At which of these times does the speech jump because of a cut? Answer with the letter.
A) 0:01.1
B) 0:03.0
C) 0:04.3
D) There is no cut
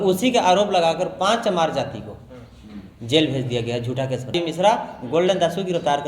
C